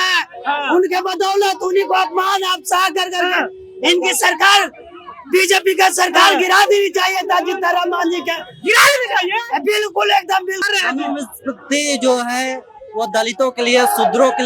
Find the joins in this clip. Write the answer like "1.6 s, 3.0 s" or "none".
10.6 s